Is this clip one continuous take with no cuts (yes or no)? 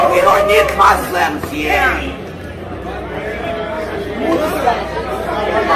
yes